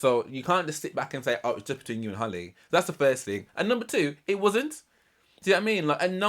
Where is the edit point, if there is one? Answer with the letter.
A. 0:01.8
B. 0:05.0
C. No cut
C